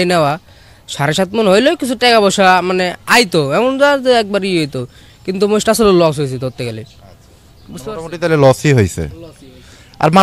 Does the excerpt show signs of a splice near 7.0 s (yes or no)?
no